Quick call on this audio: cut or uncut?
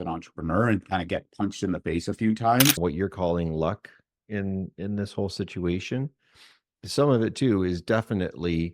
cut